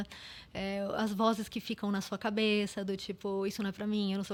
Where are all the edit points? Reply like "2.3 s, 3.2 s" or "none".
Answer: none